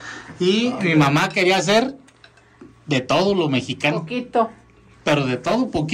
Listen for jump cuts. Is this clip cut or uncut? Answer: uncut